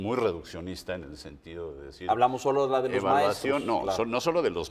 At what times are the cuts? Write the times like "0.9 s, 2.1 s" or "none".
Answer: none